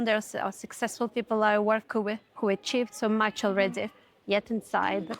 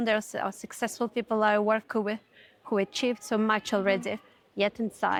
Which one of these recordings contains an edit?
first; 1 cut; at 2.3 s

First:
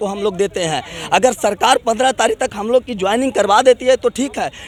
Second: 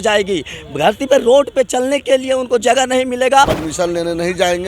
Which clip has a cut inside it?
second; 1 cut; at 3.5 s

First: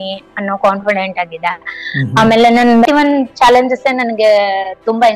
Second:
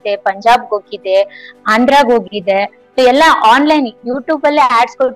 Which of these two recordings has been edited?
first; 1 cut; at 2.9 s

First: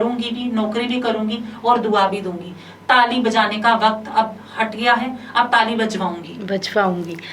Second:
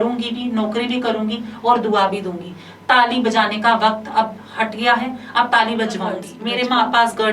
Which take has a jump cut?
second; 1 cut; at 6.3 s

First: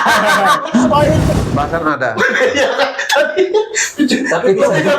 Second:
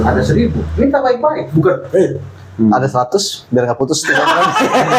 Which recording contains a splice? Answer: first; 1 cut; at 1.3 s

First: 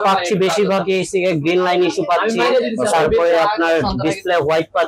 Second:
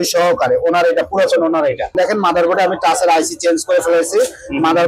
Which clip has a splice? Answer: second; 1 cut; at 1.9 s

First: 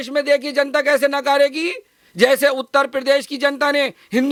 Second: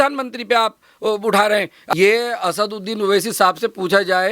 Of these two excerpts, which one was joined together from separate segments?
second; 1 cut; at 1.9 s

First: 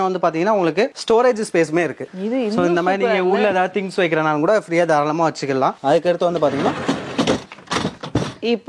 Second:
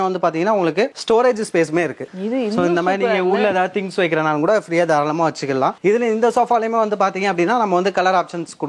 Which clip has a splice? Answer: first; 1 cut; at 5.8 s

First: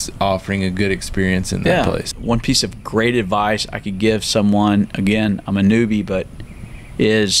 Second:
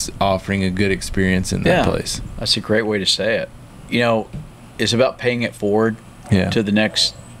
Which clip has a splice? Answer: first; 1 cut; at 2.1 s

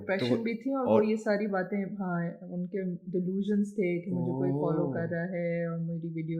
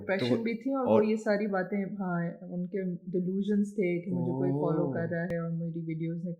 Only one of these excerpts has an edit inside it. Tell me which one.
second; 1 cut; at 5.3 s

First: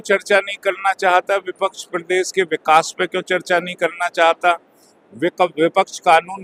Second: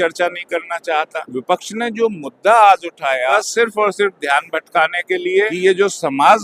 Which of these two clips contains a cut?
second; 3 cuts; at 1.2 s, 3.3 s, 5.5 s

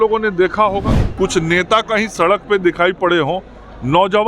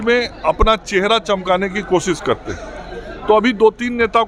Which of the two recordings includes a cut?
first; 1 cut; at 1.0 s

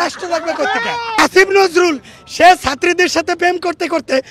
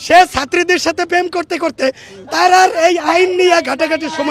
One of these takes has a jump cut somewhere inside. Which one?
first; 1 cut; at 1.2 s

